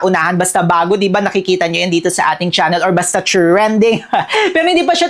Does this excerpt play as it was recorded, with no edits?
yes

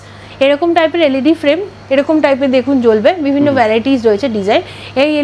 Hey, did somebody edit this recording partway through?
no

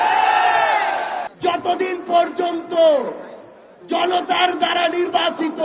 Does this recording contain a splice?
yes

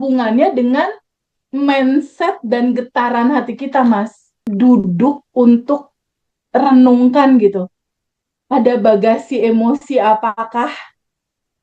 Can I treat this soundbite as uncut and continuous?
no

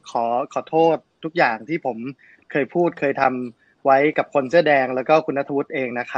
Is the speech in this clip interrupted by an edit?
no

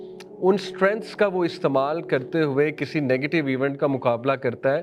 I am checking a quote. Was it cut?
no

